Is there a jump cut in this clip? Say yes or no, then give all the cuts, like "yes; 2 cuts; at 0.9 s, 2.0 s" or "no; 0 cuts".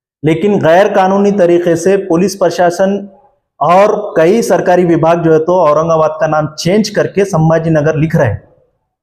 no; 0 cuts